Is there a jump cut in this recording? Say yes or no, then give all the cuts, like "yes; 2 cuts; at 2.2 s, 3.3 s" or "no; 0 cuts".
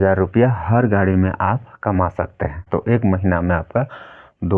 yes; 1 cut; at 2.6 s